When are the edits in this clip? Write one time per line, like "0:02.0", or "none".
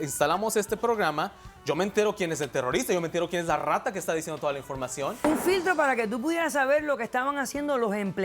0:05.2